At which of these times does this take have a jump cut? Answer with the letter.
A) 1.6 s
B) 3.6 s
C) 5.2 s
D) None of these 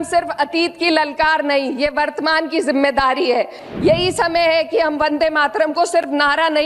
B